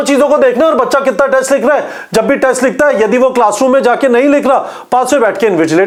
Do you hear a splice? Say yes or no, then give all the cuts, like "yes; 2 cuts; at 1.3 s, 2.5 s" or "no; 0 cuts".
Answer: no; 0 cuts